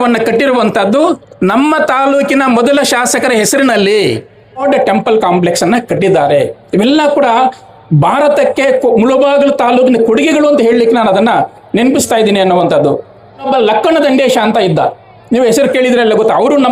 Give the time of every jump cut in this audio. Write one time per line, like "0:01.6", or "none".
0:04.6
0:13.5